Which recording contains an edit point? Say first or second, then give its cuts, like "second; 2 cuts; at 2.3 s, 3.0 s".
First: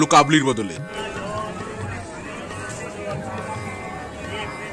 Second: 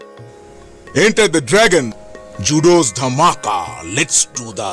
first; 1 cut; at 0.9 s